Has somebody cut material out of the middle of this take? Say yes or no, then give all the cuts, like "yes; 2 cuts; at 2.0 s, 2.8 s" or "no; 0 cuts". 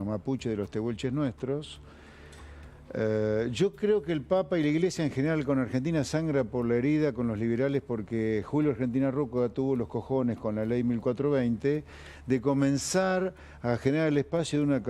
no; 0 cuts